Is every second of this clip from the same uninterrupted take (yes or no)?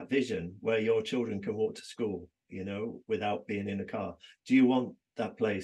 yes